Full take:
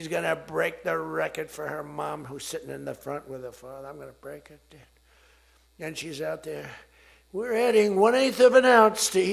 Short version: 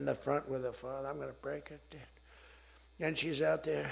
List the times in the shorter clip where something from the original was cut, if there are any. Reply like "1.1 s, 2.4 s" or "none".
none